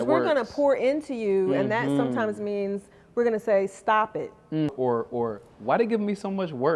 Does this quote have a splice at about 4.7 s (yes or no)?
yes